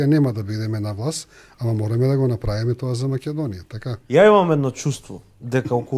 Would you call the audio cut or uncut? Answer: cut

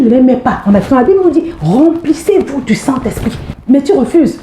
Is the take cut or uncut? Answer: cut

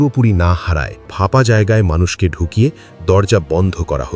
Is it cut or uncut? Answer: cut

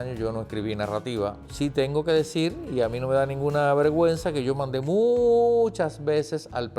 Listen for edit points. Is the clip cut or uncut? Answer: cut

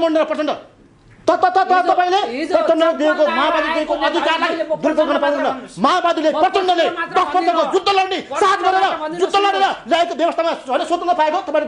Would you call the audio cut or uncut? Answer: uncut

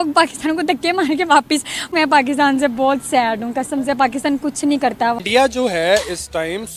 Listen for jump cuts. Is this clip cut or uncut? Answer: cut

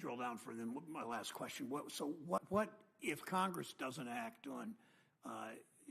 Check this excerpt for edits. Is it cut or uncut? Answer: cut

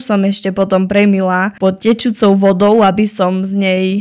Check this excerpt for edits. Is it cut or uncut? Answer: uncut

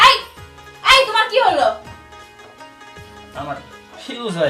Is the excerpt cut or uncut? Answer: cut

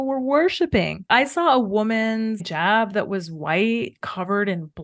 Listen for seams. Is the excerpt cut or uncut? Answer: cut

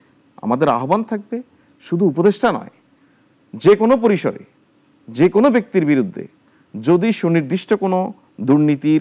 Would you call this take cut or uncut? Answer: uncut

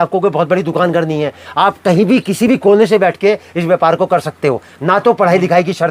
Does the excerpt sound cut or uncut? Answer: uncut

